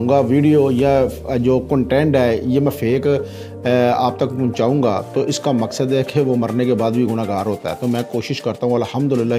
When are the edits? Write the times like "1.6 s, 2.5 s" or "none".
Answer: none